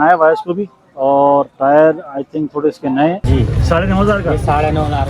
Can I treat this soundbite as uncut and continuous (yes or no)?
no